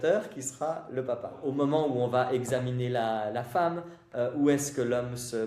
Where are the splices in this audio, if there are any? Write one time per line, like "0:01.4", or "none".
0:01.4